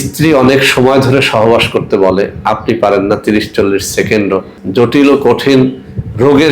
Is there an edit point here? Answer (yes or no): yes